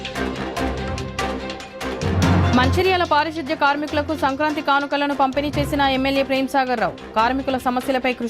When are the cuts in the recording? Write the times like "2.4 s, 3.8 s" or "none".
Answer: 2.4 s